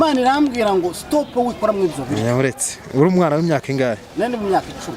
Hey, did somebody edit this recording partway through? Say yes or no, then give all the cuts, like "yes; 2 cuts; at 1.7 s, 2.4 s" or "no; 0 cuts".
no; 0 cuts